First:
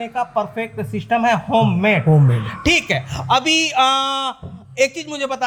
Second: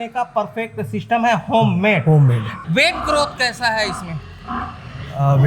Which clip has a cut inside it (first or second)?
second